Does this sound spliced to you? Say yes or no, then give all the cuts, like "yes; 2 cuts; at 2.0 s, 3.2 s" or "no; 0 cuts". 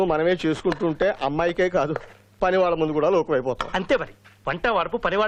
no; 0 cuts